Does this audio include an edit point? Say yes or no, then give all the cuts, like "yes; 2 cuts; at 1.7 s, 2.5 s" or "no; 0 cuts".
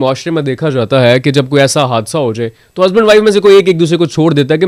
no; 0 cuts